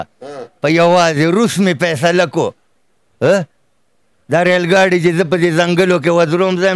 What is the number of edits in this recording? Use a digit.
0